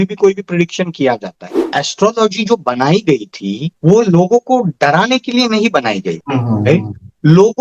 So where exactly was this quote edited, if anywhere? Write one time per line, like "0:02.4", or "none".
0:01.5